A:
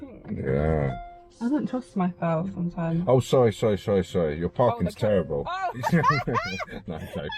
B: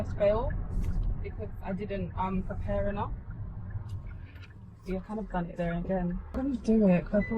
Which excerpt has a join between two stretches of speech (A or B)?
B